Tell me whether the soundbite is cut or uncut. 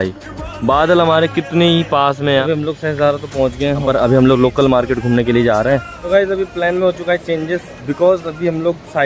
cut